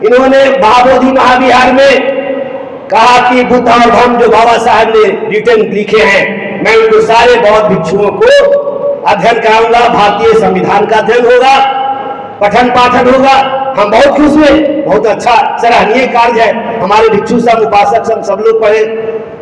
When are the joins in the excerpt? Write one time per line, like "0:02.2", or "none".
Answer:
none